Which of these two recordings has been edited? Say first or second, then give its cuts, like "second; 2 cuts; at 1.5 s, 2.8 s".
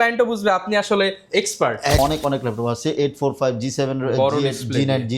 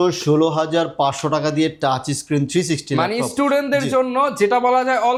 first; 1 cut; at 2.0 s